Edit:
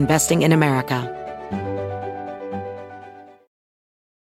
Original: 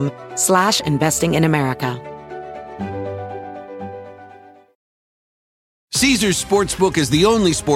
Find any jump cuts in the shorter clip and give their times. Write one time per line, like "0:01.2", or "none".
0:01.0